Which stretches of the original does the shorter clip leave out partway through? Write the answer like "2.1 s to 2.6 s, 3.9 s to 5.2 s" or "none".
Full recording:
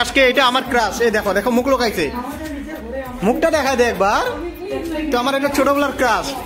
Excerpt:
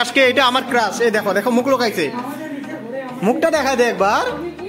none